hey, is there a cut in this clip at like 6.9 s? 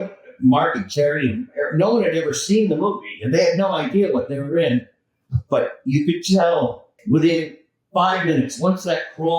yes; 1 cut; at 6.9 s

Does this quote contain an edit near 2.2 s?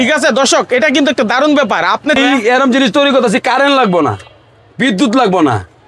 yes; 1 cut; at 2.2 s

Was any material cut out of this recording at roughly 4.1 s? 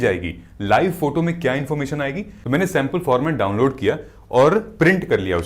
no; 1 cut; at 2.3 s

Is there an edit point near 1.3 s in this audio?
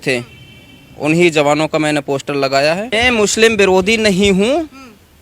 no; 1 cut; at 2.9 s

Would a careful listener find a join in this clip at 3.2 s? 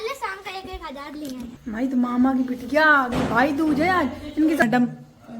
no; 2 cuts; at 1.6 s, 4.6 s

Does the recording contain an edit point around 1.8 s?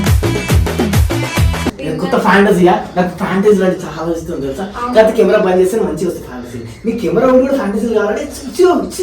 yes; 1 cut; at 1.8 s

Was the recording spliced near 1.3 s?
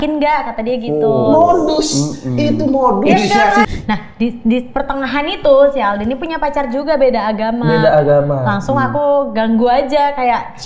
no; 1 cut; at 3.7 s

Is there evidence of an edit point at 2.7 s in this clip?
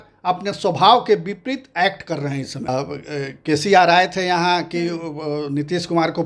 yes; 1 cut; at 2.7 s

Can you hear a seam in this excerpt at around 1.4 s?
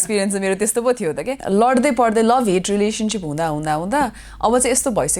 yes; 1 cut; at 1.4 s

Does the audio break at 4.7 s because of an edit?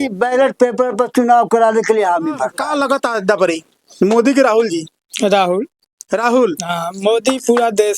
no; 1 cut; at 2.6 s

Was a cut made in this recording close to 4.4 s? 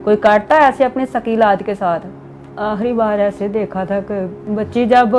yes; 2 cuts; at 2.1 s, 4.4 s

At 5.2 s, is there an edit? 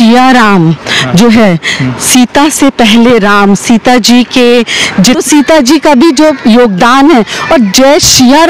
yes; 1 cut; at 5.2 s

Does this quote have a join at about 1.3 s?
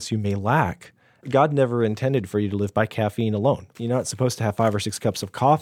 yes; 2 cuts; at 1.3 s, 3.7 s

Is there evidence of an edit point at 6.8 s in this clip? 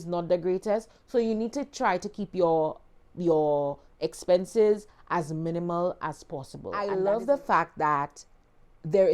yes; 1 cut; at 6.8 s

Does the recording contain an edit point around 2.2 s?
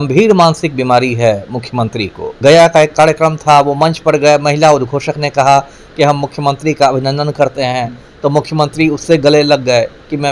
yes; 1 cut; at 2.2 s

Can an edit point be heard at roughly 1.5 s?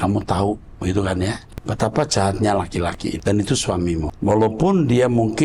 yes; 3 cuts; at 1.5 s, 3.2 s, 4.1 s

